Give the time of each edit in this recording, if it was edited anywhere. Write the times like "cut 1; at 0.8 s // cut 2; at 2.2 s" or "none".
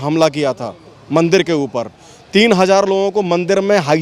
none

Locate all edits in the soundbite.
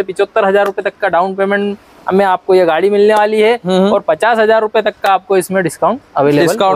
none

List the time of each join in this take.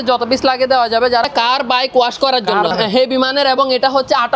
cut 1; at 1.2 s // cut 2; at 2.7 s

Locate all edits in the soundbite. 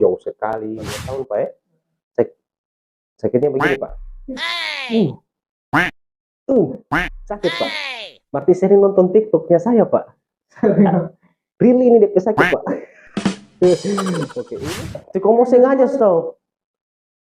cut 1; at 1.0 s // cut 2; at 14.4 s

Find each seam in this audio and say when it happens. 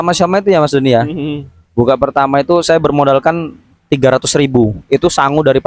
none

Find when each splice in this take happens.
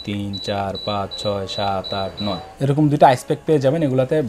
cut 1; at 2.5 s

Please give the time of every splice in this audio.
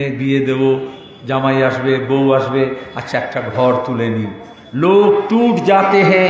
none

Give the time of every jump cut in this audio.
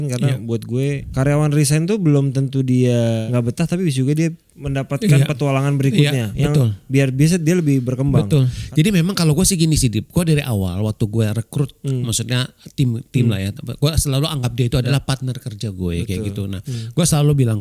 cut 1; at 8.6 s // cut 2; at 14.9 s

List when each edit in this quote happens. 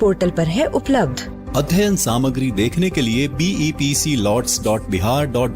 none

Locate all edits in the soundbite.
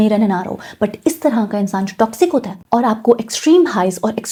none

